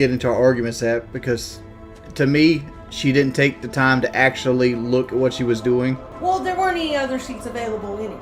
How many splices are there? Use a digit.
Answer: 0